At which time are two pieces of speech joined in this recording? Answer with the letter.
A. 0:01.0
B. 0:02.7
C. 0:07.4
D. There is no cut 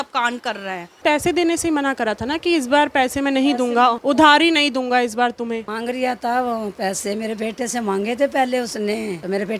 A